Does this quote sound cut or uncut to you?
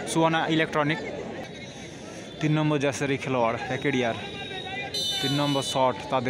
cut